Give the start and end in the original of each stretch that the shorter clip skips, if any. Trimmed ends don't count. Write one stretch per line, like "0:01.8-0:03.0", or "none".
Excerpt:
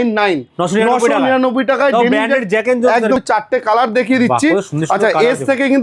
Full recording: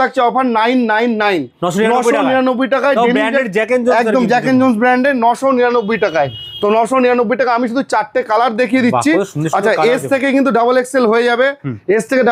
0:04.2-0:07.8